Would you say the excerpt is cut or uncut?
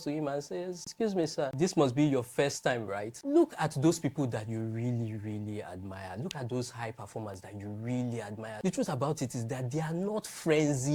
cut